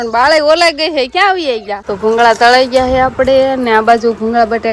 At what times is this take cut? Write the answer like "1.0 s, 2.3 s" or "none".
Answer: 1.8 s

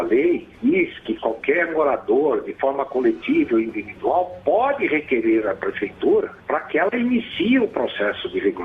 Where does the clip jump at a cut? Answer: 0.9 s, 6.4 s

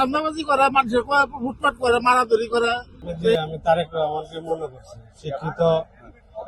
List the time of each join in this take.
3.3 s

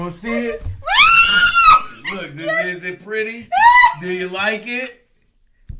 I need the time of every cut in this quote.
2.0 s

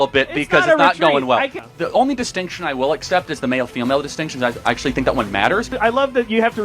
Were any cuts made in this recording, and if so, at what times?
1.6 s, 5.7 s

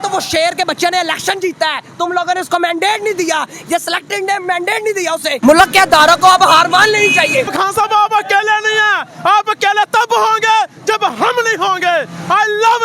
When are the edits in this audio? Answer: 5.3 s, 7.5 s

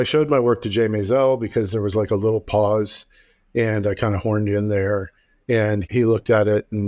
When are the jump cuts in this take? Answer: none

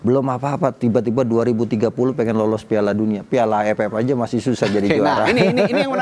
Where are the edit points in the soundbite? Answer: none

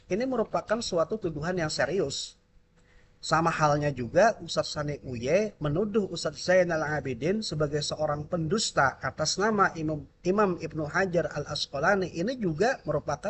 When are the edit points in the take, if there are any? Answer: none

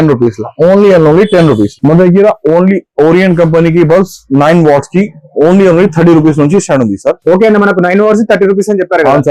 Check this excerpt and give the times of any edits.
none

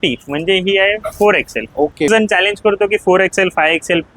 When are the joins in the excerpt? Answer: 2.1 s

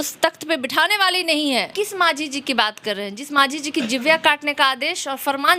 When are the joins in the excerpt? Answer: 1.7 s

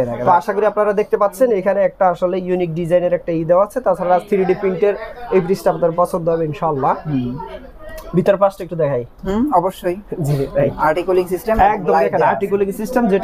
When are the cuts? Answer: none

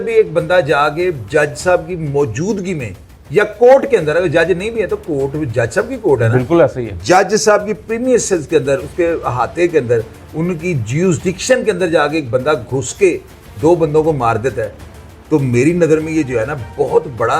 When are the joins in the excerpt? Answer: none

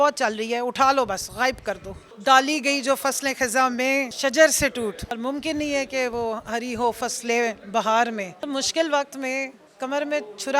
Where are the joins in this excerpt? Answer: 2.0 s, 4.1 s, 5.2 s, 8.4 s

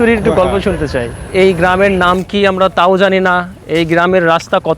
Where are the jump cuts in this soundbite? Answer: 1.2 s

